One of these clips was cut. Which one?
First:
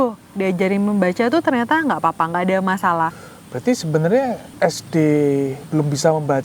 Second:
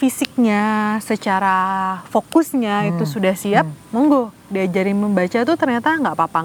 first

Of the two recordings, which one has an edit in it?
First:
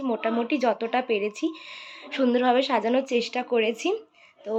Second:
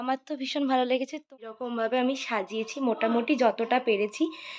second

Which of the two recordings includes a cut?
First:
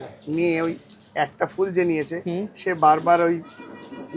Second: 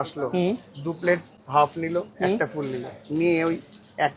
second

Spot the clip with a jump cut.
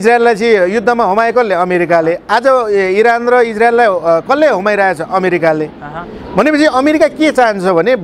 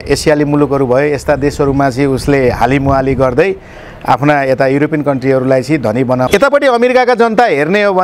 second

